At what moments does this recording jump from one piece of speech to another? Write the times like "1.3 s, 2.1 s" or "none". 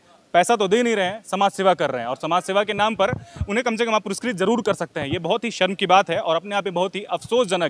none